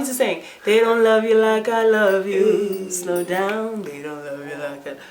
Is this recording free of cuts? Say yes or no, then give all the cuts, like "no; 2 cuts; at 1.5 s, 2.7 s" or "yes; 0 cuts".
yes; 0 cuts